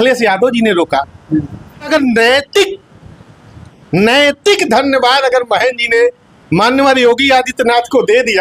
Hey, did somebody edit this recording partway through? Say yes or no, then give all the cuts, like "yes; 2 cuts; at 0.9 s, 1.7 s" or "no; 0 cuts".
yes; 1 cut; at 1.9 s